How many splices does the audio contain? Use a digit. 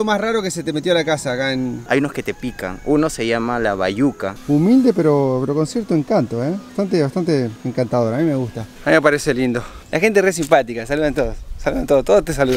3